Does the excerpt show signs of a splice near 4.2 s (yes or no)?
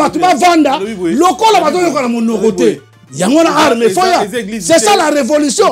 no